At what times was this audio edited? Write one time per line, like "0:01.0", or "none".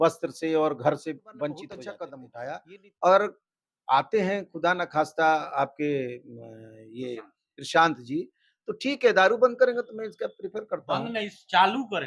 0:02.3